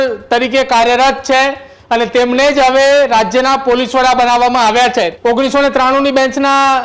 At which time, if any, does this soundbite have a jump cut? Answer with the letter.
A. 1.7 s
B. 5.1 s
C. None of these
B